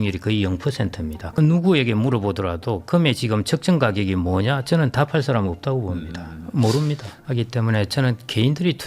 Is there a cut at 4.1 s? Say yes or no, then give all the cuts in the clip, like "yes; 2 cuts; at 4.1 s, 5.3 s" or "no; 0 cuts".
no; 2 cuts; at 1.3 s, 7.2 s